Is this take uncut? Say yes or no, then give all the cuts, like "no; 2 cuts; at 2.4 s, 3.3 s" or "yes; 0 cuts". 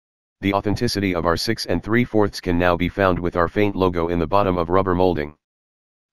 yes; 0 cuts